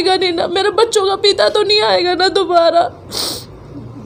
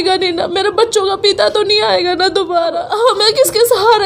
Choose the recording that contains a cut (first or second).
second